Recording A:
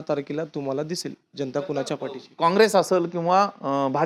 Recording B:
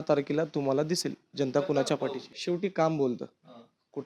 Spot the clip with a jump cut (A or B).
B